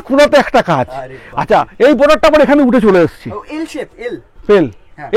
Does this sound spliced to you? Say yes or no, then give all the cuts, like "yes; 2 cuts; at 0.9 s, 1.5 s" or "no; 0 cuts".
no; 0 cuts